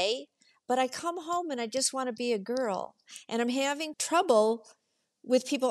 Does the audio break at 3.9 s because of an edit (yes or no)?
yes